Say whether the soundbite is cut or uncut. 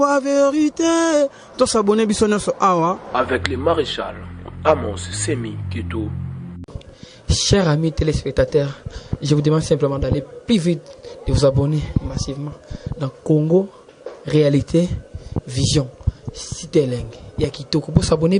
cut